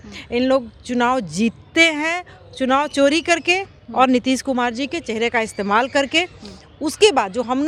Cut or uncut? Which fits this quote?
uncut